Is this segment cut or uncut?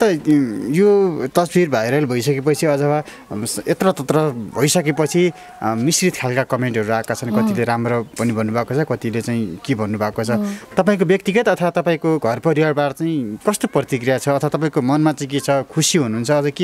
uncut